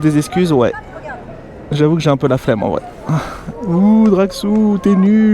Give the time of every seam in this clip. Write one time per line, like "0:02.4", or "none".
0:02.9